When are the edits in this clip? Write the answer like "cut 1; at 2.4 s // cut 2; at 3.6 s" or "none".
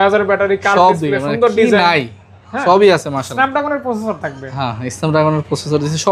none